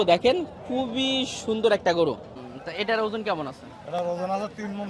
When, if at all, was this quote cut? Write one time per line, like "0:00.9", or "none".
0:02.3